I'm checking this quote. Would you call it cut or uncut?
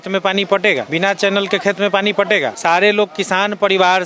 cut